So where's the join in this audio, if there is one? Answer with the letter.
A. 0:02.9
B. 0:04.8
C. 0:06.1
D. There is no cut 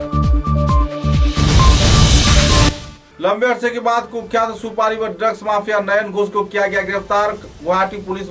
A